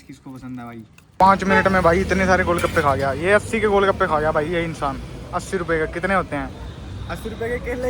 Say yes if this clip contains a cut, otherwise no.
yes